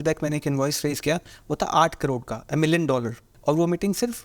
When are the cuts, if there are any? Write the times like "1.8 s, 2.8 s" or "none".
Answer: 3.3 s